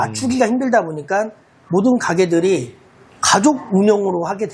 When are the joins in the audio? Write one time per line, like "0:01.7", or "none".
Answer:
none